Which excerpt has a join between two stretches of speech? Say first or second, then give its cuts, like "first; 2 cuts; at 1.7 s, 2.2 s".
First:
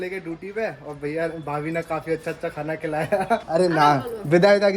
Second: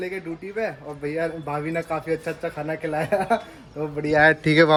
first; 1 cut; at 3.5 s